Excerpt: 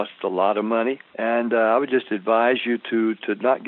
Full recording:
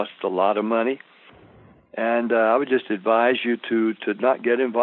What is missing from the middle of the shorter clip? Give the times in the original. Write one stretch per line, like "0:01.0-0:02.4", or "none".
0:01.1-0:01.9